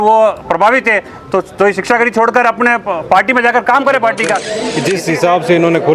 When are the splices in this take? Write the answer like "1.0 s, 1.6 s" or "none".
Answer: 4.6 s